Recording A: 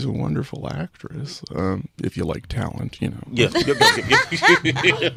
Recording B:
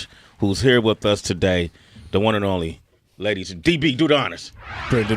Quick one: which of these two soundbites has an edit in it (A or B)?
B